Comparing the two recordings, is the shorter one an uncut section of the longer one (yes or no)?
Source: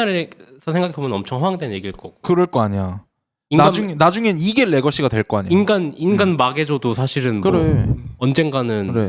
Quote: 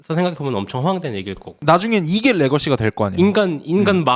no